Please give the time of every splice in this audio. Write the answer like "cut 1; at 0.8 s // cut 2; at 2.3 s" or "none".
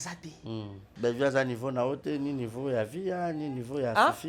cut 1; at 0.9 s

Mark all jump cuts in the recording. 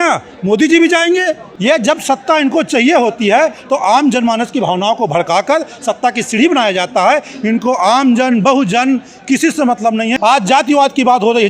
cut 1; at 1.5 s // cut 2; at 10.2 s

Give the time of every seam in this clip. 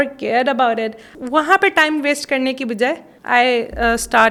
none

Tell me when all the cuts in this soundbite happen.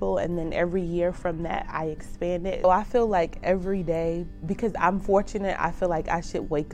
cut 1; at 2.6 s

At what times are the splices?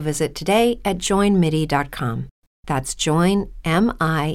cut 1; at 1.0 s

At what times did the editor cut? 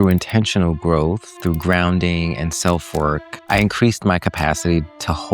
cut 1; at 1.3 s // cut 2; at 3.3 s

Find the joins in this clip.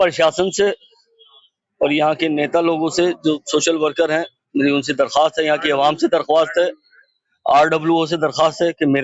none

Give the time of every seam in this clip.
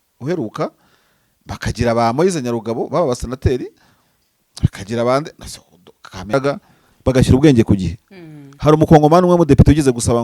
cut 1; at 6.3 s

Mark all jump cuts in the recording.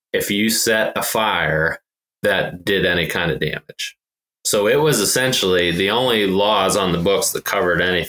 none

